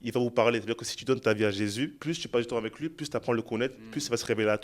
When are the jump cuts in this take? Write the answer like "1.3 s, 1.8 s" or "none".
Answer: 2.0 s